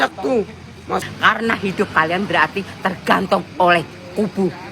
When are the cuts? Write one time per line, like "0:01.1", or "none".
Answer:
0:01.0